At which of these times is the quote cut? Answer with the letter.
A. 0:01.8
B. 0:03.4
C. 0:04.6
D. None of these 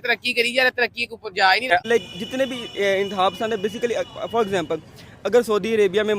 A